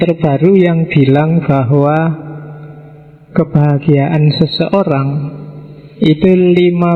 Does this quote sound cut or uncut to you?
uncut